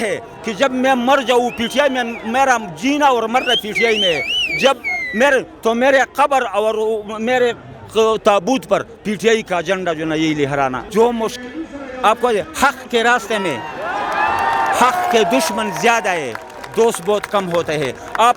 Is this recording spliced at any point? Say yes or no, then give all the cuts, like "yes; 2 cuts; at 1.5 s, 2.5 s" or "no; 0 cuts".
no; 0 cuts